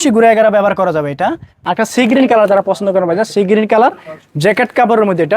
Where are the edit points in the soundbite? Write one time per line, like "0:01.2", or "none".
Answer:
0:01.6